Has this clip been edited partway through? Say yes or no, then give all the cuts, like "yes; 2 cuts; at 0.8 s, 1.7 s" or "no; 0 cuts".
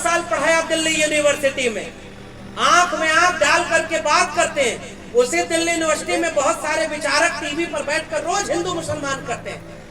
no; 0 cuts